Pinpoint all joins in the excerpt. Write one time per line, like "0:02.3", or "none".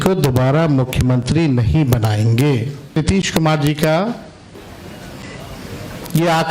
0:03.0

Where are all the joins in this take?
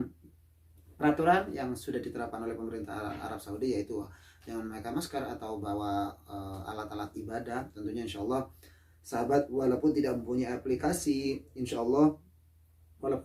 none

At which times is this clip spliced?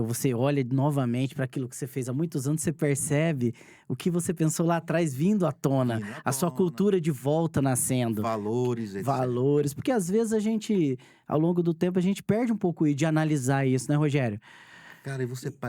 none

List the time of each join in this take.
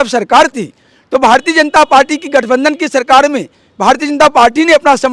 none

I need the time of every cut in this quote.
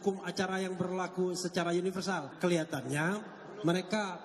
0:02.3

